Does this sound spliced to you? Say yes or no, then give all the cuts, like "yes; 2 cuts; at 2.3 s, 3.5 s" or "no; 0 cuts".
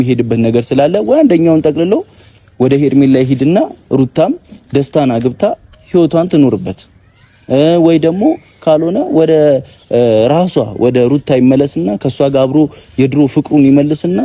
no; 0 cuts